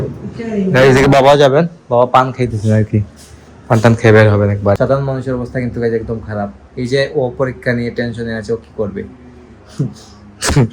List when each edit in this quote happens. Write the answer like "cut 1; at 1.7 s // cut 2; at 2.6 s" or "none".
cut 1; at 4.8 s